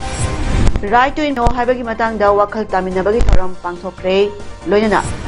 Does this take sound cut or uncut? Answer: cut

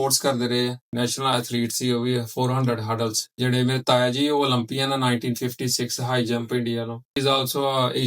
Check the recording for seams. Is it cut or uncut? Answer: cut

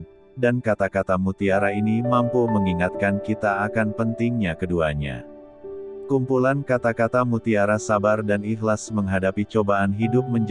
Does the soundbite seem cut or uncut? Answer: cut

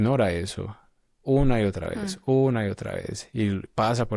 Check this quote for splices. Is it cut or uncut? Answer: uncut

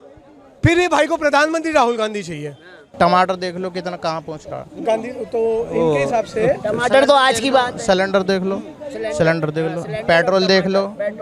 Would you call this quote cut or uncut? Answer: cut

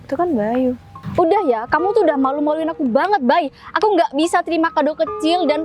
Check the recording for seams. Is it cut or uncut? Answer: cut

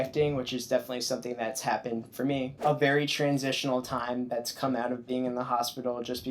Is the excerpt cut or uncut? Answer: cut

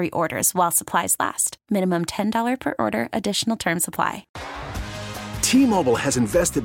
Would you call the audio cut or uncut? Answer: cut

